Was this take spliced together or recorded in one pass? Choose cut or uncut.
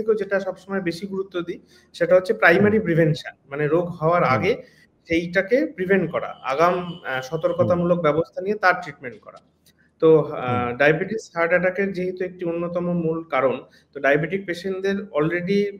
uncut